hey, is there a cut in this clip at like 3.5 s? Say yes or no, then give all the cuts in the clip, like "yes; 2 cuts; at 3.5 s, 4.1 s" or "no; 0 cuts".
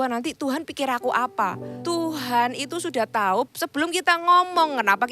yes; 2 cuts; at 1.7 s, 3.5 s